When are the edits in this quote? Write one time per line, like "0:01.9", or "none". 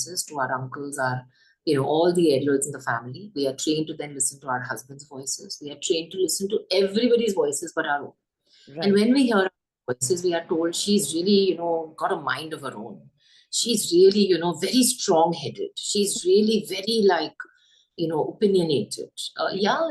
none

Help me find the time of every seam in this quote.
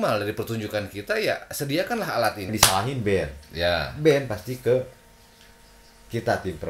0:02.5

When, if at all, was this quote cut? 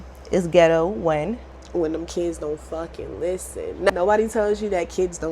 0:01.5
0:03.9

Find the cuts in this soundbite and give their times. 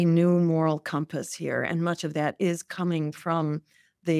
none

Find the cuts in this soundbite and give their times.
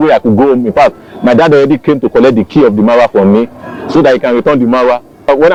none

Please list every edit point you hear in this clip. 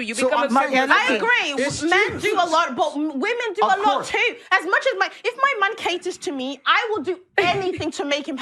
0:01.4

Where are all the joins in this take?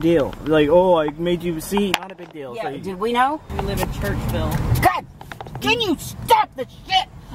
0:03.5

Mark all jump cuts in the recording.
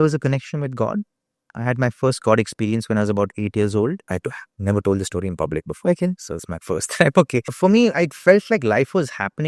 0:04.1
0:07.4

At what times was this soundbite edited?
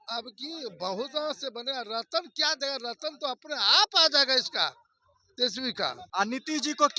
0:06.0

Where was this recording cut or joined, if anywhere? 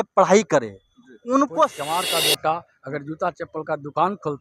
0:01.7

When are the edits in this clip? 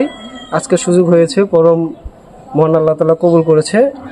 none

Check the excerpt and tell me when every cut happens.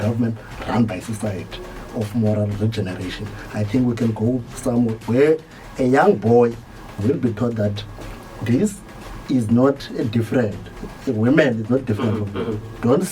none

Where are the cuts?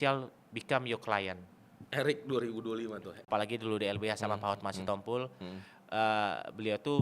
0:03.2

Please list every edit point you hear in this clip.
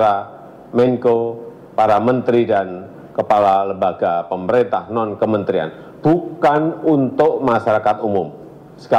none

